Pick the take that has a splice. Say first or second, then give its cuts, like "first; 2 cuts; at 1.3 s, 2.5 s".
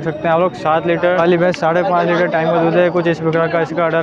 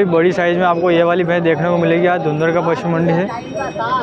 first; 1 cut; at 1.2 s